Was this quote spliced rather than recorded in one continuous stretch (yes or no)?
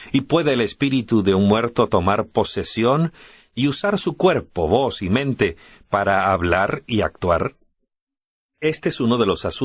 yes